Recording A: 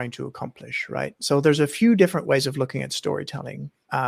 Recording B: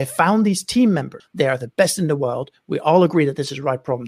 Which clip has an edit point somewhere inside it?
B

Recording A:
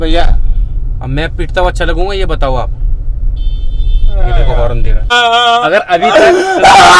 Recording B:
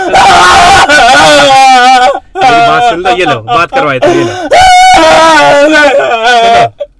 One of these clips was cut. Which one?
A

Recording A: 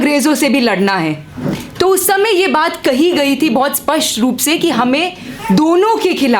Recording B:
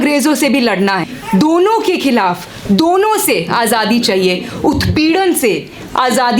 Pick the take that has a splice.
B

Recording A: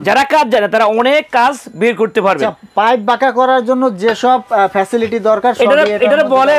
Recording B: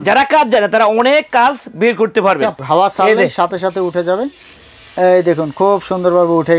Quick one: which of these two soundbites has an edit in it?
B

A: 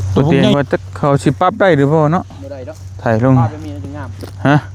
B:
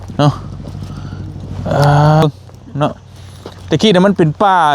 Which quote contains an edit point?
B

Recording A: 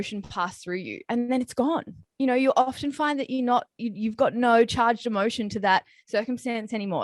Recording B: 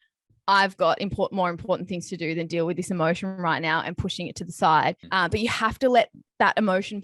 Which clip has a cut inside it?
B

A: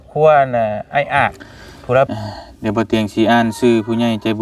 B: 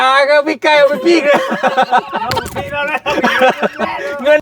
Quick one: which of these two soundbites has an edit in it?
A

